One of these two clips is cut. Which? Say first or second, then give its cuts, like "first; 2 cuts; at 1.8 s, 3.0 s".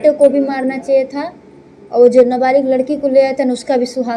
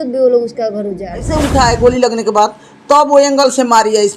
second; 1 cut; at 1.2 s